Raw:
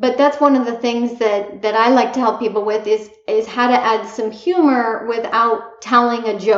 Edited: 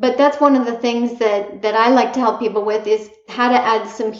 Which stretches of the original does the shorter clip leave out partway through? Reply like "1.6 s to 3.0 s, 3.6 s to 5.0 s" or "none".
3.3 s to 3.5 s

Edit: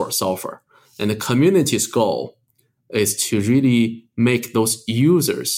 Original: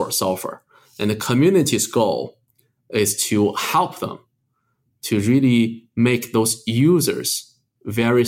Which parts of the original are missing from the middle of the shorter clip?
3.2 s to 5.0 s

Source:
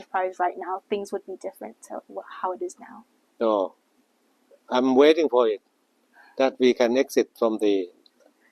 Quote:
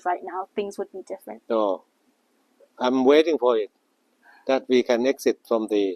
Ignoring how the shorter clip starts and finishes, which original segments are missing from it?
1.7 s to 3.2 s

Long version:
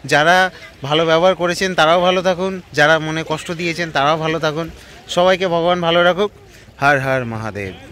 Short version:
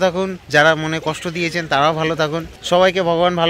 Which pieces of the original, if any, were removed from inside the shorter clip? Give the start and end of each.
4.7 s to 5.0 s

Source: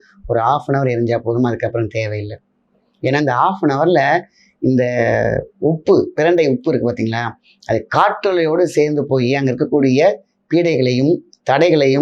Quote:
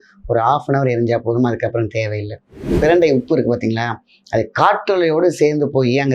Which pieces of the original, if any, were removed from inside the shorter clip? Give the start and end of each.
2.7 s to 6.1 s

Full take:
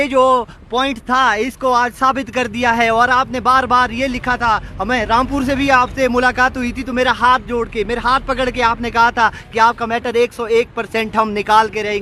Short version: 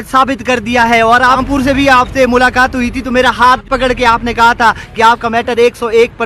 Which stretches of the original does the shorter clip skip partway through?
3.3 s to 5.2 s, 7.5 s to 8.2 s

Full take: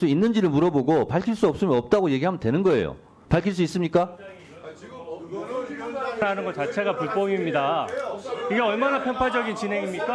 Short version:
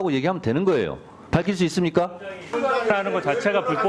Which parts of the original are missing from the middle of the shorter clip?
4.4 s to 5.8 s

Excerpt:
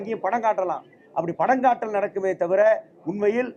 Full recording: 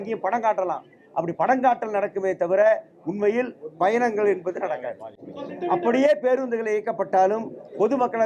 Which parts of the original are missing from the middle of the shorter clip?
none

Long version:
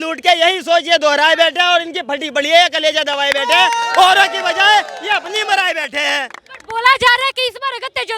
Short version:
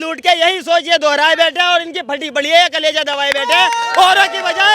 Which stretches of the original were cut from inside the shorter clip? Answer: none

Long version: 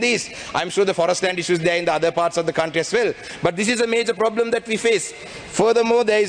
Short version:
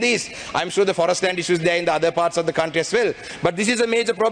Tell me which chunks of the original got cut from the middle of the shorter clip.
none

